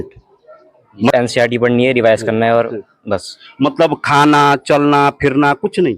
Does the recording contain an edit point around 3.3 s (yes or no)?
no